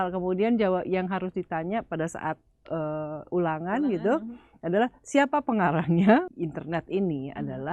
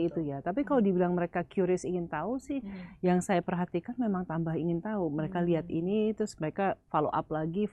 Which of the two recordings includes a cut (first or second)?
first